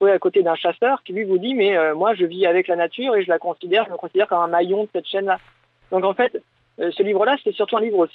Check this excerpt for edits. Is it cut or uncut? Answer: uncut